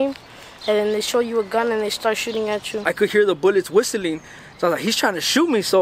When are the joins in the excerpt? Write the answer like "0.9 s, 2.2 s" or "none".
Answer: 2.8 s

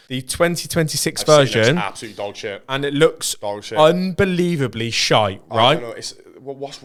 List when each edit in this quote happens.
none

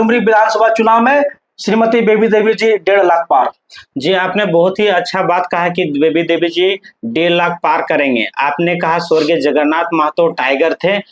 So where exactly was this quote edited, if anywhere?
none

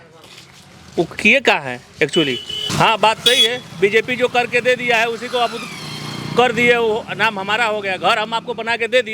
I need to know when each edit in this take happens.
2.6 s

